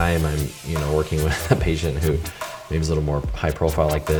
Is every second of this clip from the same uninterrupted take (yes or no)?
yes